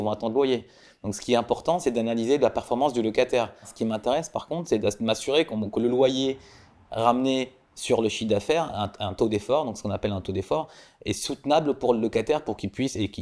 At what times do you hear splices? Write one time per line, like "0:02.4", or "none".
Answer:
0:03.7